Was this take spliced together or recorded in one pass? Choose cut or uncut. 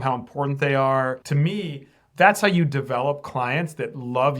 cut